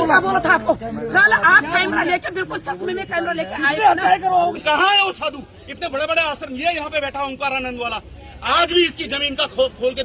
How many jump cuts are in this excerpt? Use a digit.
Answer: 1